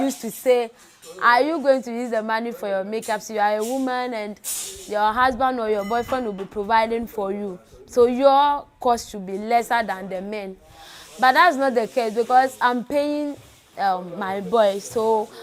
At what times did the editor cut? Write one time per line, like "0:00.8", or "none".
none

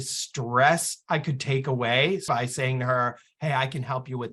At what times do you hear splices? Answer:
0:02.2

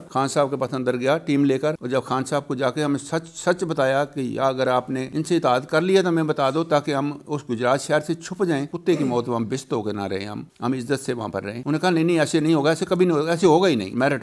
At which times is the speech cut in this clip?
0:01.8
0:08.7

